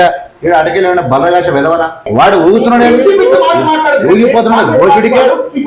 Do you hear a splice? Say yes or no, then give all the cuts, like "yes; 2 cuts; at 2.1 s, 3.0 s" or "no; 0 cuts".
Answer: yes; 1 cut; at 2.1 s